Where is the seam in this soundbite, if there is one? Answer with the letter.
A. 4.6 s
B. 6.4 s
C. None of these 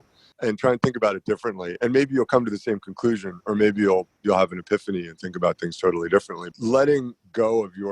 B